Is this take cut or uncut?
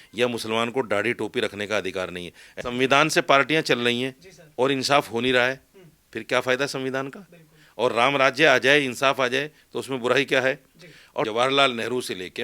cut